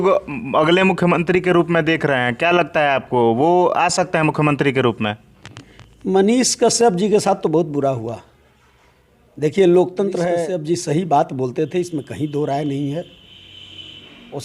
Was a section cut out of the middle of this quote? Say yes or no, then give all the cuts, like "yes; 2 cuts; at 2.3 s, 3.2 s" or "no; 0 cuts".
yes; 1 cut; at 10.3 s